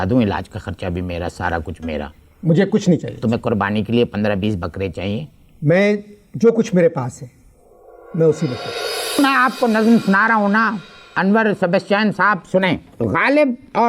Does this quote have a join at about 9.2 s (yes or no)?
yes